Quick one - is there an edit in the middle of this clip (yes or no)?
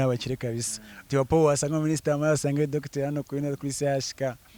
no